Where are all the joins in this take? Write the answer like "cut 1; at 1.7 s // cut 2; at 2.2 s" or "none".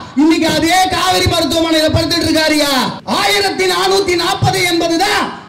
cut 1; at 3.0 s